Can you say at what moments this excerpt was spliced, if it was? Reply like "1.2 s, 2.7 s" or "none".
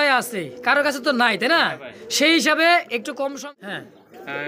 3.4 s